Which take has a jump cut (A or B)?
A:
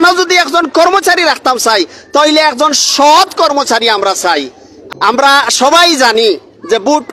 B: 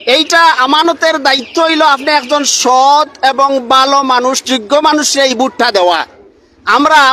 A